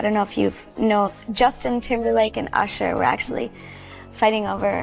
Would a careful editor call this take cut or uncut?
uncut